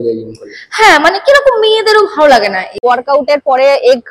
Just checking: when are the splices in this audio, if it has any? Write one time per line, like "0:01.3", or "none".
0:02.8